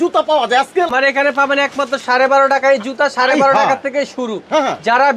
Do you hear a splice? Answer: yes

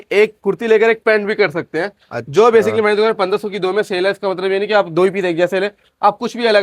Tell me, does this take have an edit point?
no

